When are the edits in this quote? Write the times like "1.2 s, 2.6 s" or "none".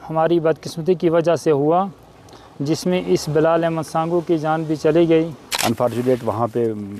5.4 s